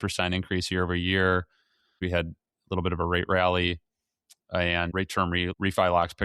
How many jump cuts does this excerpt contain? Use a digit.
2